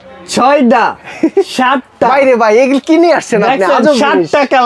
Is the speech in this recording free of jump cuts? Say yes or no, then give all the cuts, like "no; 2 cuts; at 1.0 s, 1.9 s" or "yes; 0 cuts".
yes; 0 cuts